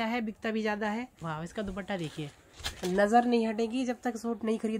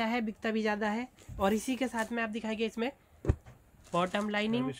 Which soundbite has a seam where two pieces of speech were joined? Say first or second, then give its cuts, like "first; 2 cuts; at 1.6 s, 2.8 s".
first; 1 cut; at 1.2 s